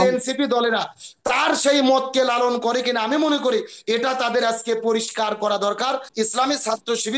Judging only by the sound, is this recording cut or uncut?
cut